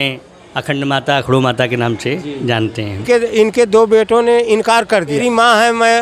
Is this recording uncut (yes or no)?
no